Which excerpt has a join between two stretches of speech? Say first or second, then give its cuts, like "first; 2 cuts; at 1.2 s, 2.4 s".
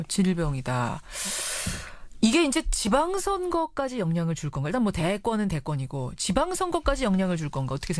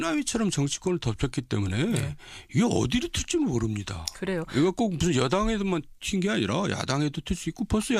first; 1 cut; at 6.3 s